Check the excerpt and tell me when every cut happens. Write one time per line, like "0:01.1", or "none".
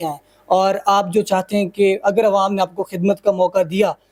none